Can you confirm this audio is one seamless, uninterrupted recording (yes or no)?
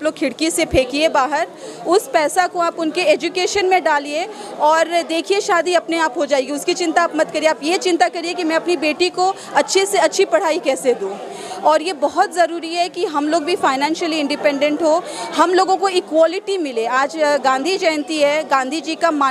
yes